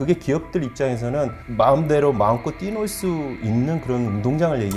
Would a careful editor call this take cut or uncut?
cut